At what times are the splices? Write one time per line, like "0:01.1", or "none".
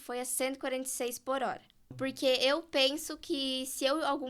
0:02.0